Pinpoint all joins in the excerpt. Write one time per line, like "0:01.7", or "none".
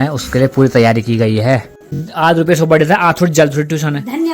0:02.0